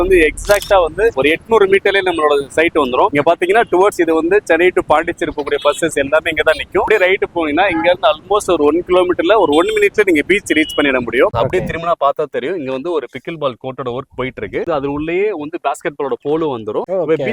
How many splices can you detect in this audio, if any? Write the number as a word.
four